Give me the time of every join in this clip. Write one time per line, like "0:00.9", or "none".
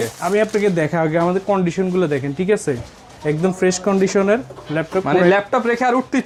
none